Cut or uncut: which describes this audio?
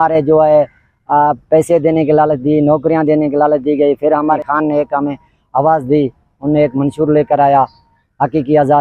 cut